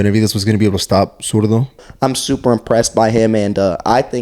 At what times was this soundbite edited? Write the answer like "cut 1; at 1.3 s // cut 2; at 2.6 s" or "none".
cut 1; at 1.9 s